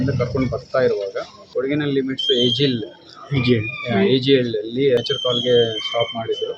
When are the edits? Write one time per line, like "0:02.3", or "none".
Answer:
0:01.4
0:05.0